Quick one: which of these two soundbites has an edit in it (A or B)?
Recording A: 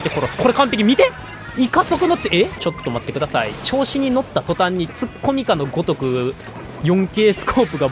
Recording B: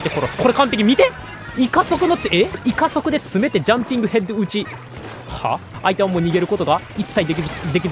B